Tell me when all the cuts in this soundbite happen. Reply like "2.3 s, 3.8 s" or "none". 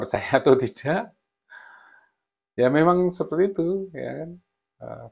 none